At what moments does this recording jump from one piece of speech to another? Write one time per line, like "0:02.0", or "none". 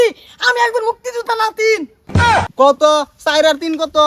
0:02.5